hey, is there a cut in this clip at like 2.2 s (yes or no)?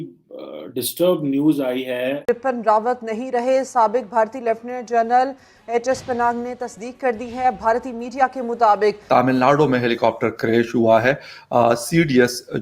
yes